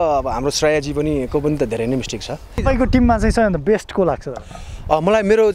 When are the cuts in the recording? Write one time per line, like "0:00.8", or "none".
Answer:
0:02.6